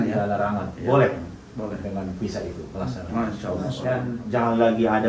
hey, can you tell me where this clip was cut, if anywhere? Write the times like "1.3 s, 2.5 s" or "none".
3.9 s